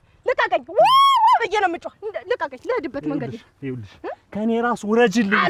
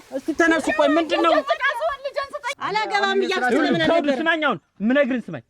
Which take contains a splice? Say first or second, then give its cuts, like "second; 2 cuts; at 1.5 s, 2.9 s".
second; 1 cut; at 2.4 s